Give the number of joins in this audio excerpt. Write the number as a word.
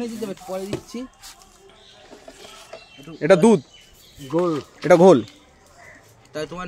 zero